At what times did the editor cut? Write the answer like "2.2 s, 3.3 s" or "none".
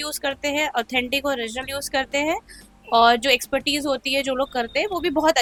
none